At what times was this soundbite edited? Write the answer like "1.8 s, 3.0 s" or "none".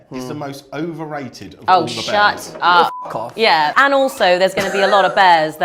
none